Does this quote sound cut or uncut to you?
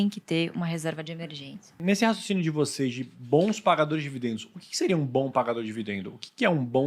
cut